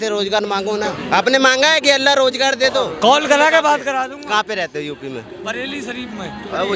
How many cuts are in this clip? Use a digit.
2